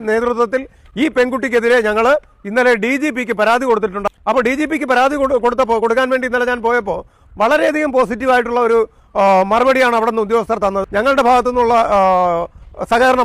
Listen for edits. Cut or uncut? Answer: cut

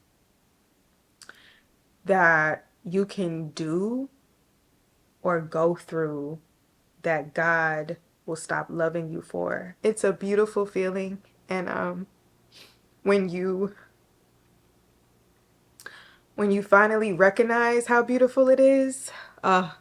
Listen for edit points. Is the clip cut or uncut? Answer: cut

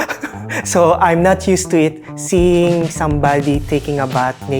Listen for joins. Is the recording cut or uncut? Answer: uncut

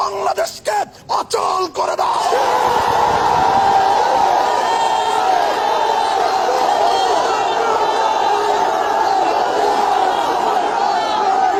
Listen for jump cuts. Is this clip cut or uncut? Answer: uncut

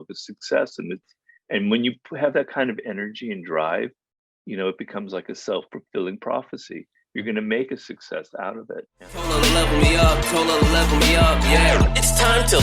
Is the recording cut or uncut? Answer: cut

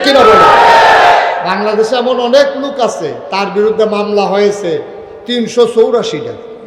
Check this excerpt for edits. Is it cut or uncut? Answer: cut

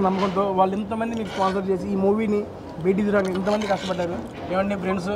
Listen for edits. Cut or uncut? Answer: uncut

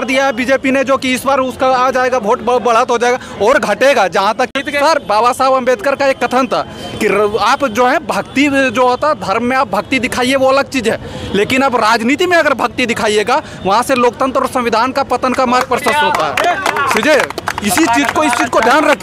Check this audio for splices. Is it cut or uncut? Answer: cut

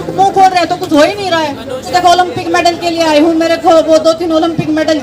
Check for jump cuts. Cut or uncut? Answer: cut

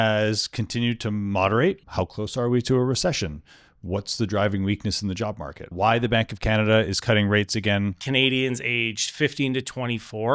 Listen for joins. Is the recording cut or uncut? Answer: cut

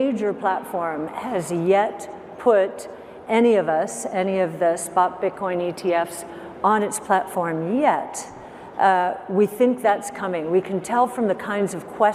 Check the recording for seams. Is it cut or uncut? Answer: uncut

